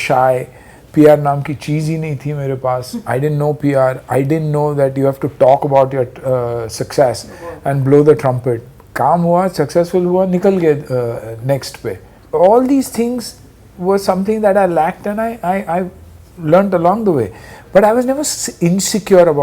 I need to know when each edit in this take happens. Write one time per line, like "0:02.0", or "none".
none